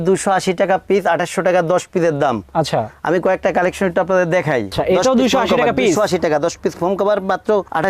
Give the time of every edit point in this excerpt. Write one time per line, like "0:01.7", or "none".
0:04.7